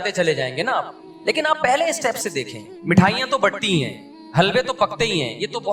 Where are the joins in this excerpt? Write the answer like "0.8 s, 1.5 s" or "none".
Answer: none